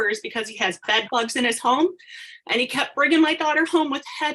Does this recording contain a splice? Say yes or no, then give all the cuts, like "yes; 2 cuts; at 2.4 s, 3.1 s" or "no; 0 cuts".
no; 0 cuts